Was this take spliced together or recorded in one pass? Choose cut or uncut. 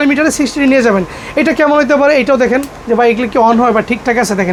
uncut